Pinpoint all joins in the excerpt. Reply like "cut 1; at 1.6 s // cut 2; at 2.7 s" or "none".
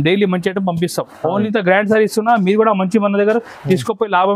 cut 1; at 1.5 s